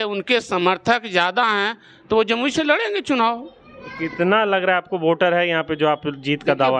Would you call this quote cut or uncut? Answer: uncut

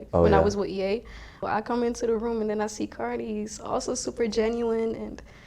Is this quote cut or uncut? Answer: cut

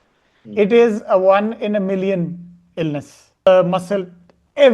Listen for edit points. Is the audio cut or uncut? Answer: cut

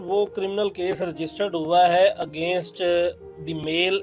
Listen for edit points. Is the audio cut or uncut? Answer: uncut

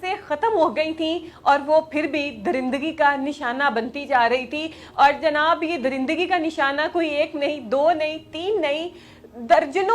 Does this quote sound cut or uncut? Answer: uncut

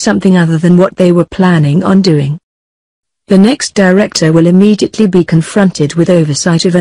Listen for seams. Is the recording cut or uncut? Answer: cut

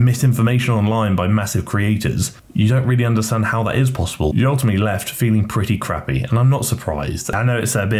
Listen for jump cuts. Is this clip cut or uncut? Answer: uncut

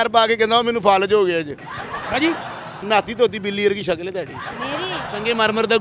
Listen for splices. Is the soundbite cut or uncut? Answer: cut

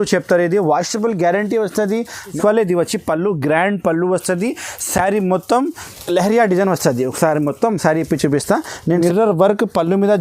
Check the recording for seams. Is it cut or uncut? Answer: cut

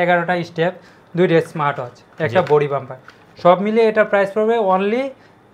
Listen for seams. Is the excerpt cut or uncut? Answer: uncut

